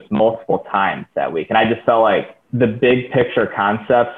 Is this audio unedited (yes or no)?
no